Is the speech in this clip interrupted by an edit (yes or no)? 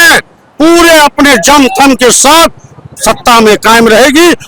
no